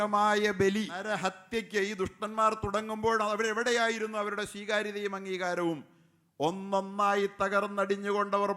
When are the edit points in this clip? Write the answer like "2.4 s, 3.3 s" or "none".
1.0 s